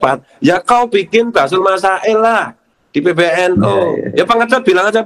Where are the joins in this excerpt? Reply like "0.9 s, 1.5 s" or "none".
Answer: 4.0 s